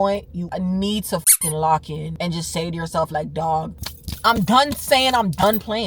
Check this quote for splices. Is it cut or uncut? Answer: uncut